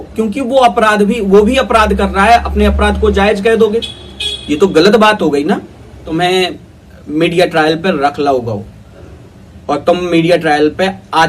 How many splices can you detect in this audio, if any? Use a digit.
1